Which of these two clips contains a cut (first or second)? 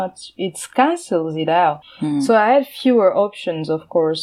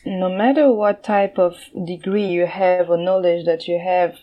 first